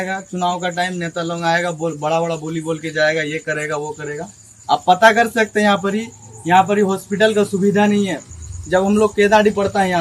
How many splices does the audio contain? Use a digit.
0